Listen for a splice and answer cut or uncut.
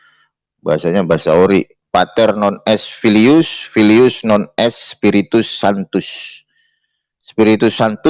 uncut